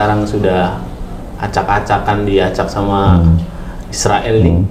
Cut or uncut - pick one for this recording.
uncut